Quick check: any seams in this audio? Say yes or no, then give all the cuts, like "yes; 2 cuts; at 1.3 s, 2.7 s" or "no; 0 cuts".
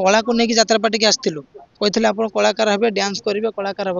no; 0 cuts